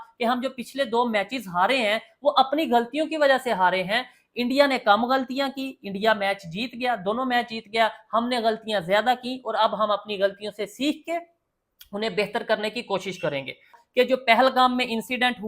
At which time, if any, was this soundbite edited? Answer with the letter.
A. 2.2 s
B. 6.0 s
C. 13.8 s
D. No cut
C